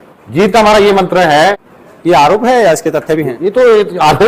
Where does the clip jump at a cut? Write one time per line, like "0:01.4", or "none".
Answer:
0:01.7